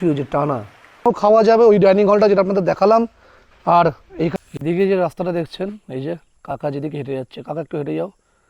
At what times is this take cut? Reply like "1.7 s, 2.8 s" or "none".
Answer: 1.1 s, 4.3 s